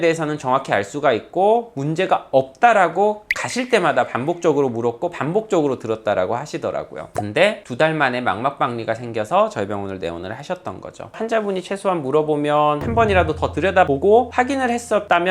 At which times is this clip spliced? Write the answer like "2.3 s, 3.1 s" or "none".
11.1 s